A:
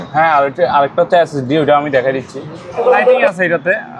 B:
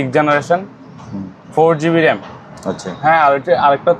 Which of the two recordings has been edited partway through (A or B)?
A